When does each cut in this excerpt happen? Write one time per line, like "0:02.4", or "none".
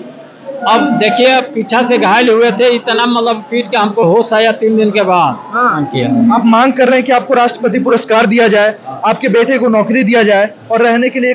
0:05.8